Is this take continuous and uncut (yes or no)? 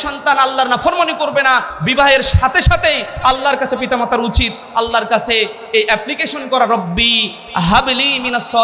no